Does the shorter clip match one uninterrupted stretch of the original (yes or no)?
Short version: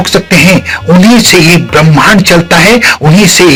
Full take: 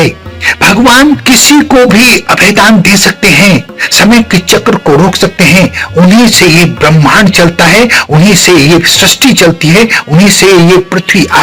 yes